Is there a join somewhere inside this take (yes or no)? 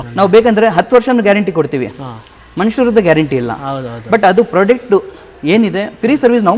no